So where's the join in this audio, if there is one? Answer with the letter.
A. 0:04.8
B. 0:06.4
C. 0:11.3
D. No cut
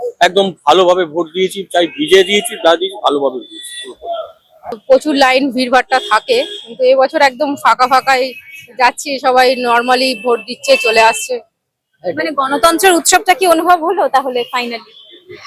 A